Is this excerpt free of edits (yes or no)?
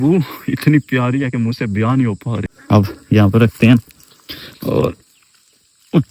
no